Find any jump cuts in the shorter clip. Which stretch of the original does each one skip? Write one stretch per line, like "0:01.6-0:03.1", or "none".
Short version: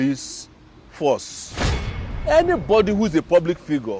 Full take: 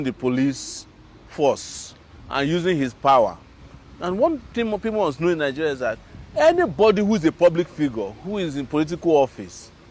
0:02.3-0:06.0